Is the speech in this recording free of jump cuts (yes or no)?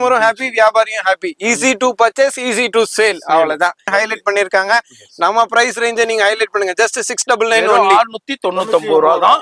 no